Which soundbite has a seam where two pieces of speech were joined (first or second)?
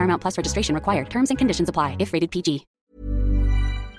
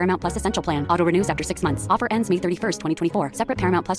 first